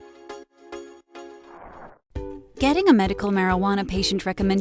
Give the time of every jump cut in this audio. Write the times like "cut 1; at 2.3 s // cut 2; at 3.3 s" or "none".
cut 1; at 2.0 s